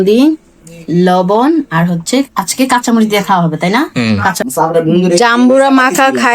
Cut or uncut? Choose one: cut